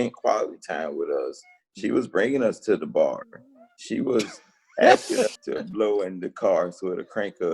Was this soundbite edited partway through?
yes; 1 cut; at 5.4 s

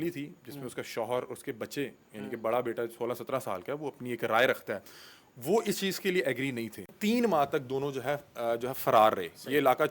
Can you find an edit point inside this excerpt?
yes; 1 cut; at 6.9 s

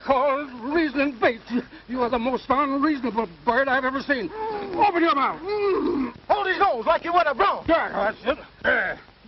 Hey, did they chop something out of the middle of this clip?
yes; 1 cut; at 8.1 s

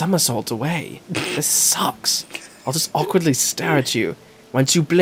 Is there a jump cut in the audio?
no; 0 cuts

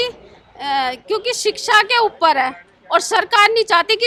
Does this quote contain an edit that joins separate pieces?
no; 0 cuts

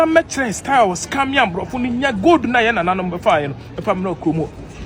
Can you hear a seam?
no; 0 cuts

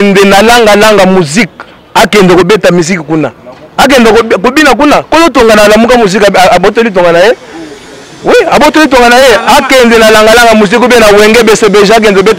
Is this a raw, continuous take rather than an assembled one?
yes; 0 cuts

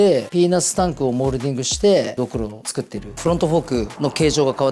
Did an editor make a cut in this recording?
yes; 1 cut; at 3.1 s

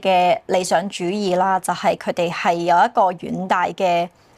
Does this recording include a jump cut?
no; 0 cuts

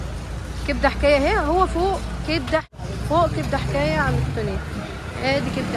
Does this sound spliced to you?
yes; 1 cut; at 2.8 s

